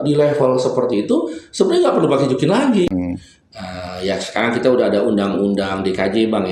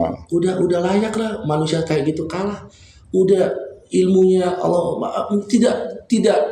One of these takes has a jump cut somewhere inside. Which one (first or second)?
first